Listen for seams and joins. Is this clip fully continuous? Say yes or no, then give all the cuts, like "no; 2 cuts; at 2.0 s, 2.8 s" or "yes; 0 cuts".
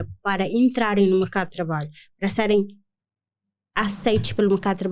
yes; 0 cuts